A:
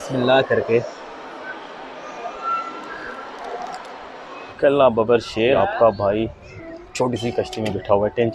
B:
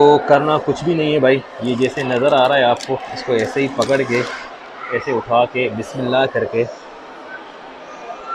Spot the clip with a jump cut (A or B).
A